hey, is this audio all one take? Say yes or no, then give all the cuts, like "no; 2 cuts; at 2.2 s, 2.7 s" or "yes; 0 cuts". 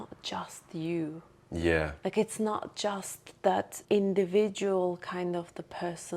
no; 1 cut; at 3.8 s